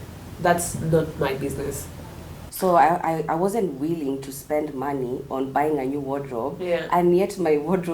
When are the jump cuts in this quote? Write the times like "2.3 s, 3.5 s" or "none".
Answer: 2.4 s